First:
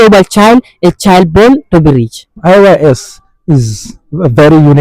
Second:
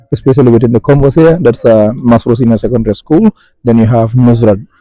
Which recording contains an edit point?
first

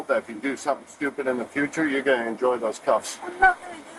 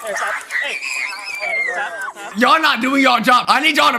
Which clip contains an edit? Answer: second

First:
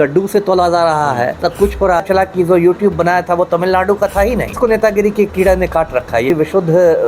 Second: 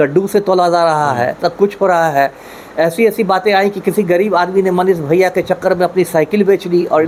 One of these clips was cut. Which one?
first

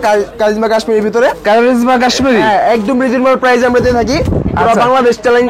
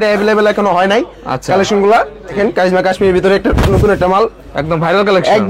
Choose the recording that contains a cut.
second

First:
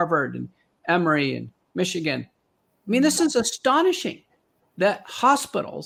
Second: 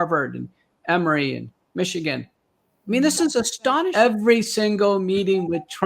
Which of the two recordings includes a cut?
second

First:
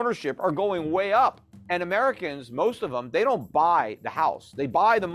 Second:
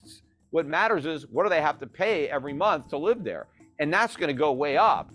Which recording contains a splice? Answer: first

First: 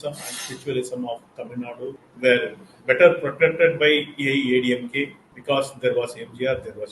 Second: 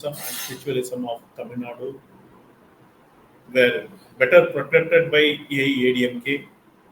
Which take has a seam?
first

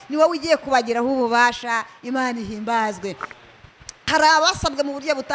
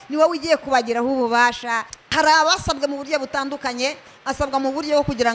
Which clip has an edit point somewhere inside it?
second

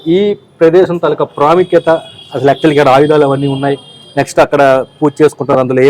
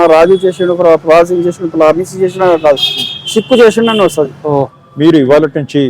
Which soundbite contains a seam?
second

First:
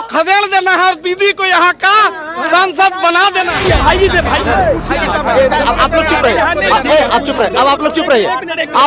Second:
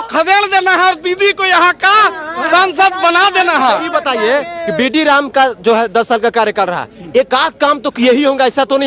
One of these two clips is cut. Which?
first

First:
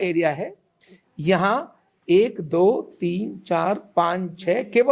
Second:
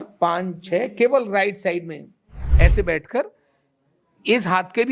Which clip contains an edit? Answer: second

